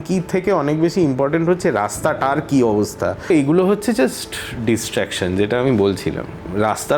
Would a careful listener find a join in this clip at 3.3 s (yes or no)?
yes